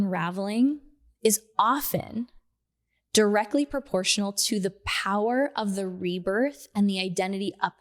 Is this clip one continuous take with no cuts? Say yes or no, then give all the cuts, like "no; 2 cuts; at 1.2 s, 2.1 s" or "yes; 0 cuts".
yes; 0 cuts